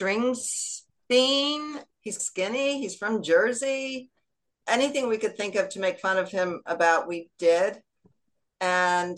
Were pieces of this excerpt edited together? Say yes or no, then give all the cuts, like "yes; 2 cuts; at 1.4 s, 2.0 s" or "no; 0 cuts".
no; 0 cuts